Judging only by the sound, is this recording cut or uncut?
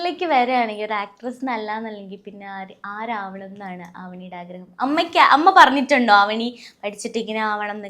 uncut